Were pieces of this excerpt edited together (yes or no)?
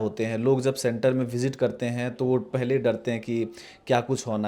no